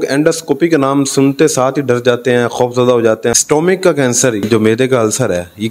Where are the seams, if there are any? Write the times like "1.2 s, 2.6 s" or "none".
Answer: 3.3 s, 4.5 s

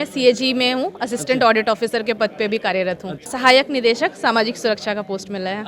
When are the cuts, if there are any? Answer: 3.3 s

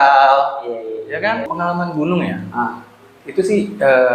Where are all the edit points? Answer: 1.5 s

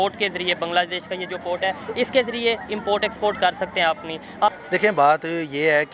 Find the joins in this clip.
4.5 s

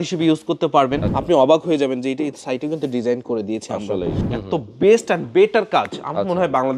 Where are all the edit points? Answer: 1.1 s, 4.2 s

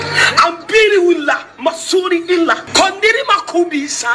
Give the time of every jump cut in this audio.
2.6 s

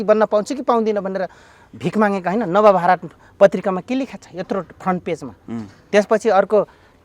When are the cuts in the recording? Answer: none

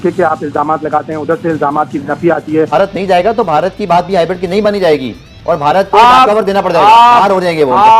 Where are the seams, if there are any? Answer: 2.7 s

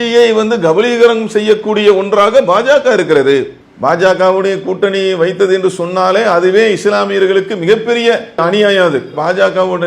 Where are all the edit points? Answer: 3.5 s, 8.4 s

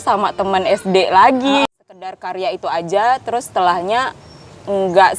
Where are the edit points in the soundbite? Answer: 1.7 s

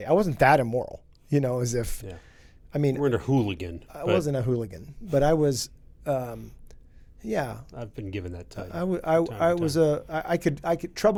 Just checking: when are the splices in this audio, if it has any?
none

